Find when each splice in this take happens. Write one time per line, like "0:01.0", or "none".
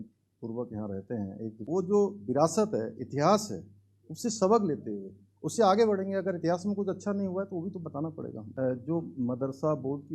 0:01.6
0:08.4